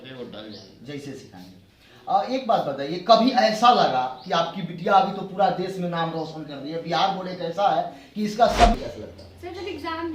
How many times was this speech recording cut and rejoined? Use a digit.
1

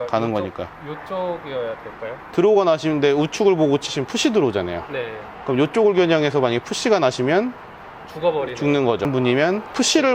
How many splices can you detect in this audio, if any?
1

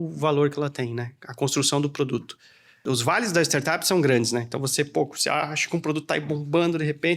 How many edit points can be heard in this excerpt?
1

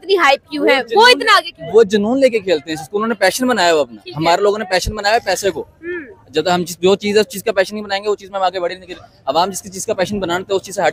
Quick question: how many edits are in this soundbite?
0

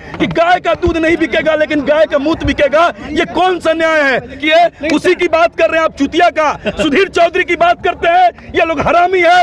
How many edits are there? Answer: 1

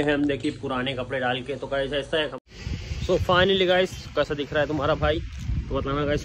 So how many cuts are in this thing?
1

